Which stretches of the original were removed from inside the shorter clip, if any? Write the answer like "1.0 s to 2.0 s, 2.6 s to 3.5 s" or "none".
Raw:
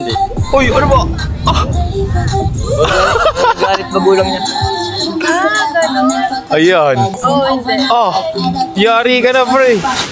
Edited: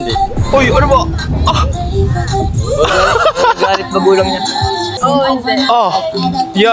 5.0 s to 7.2 s

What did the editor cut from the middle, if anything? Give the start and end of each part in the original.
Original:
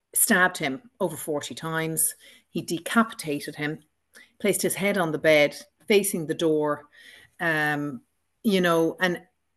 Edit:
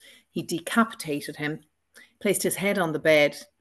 none

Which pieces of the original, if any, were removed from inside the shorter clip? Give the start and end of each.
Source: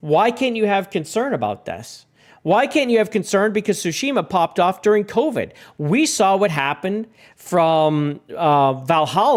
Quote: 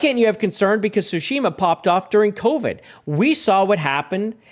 none

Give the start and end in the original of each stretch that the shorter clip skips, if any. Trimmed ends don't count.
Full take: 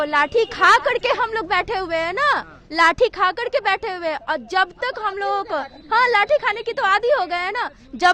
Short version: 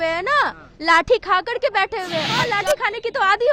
4.3 s to 6.0 s

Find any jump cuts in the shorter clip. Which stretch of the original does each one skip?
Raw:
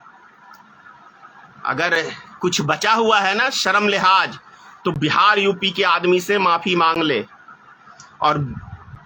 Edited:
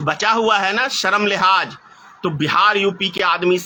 none

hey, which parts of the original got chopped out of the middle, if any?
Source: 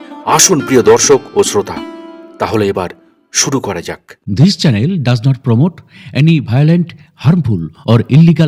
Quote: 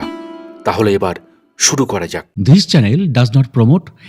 4.2 s to 4.4 s

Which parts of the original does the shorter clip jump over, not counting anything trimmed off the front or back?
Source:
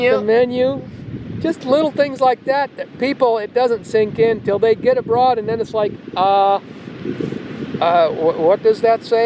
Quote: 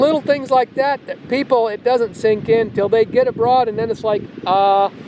none

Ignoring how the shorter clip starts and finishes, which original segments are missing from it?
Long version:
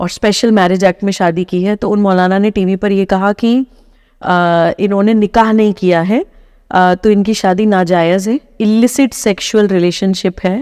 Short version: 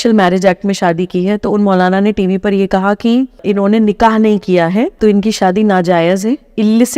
3.8 s to 4.8 s, 6.3 s to 7.0 s

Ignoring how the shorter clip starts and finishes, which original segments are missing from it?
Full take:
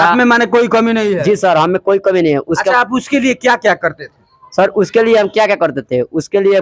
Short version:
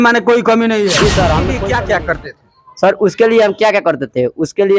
1.8 s to 3.3 s

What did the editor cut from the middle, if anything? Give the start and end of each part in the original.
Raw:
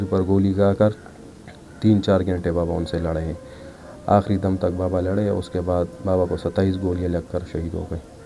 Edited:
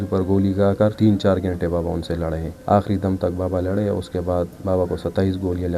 0.9 s to 1.8 s, 3.3 s to 3.9 s

